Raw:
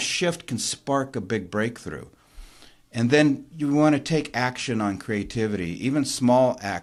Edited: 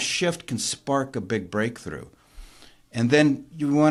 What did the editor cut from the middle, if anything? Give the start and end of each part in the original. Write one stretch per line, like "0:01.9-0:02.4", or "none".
none